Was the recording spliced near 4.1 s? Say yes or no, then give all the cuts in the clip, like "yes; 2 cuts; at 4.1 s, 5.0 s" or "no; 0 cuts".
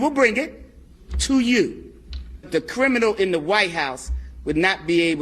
no; 1 cut; at 2.5 s